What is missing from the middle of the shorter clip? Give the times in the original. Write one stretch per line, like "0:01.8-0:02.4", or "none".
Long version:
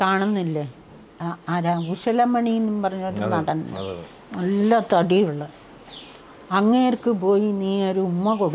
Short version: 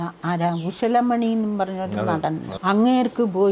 0:03.7-0:06.4